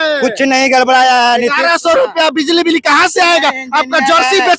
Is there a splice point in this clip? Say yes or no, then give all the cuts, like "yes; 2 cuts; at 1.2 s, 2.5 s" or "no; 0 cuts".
no; 0 cuts